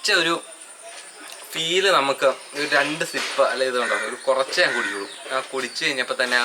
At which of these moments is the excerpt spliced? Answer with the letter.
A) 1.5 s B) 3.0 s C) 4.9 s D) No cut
D